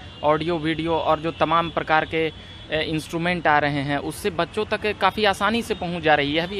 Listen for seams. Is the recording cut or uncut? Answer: uncut